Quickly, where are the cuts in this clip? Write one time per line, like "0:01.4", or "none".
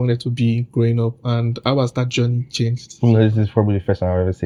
none